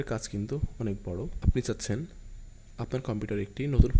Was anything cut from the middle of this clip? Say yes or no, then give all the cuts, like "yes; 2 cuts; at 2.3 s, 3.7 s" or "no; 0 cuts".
no; 0 cuts